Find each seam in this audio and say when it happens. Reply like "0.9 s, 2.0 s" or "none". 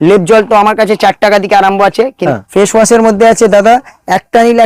2.2 s